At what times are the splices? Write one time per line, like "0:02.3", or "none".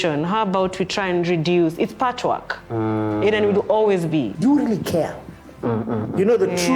0:04.3